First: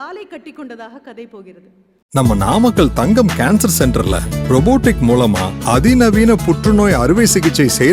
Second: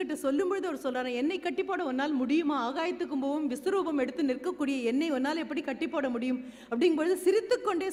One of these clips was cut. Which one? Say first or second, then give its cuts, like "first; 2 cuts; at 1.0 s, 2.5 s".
first; 1 cut; at 1.9 s